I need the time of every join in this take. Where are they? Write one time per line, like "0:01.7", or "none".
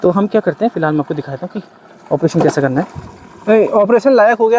none